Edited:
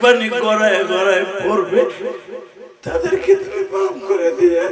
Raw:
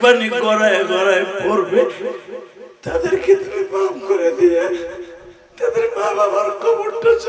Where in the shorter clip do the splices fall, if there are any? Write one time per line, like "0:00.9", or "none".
none